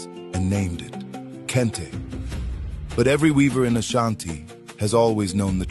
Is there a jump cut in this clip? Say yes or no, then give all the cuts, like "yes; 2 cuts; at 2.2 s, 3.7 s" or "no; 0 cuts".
no; 0 cuts